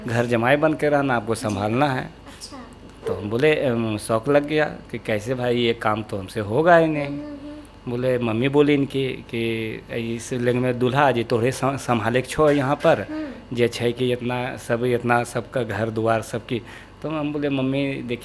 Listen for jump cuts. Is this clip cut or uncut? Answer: uncut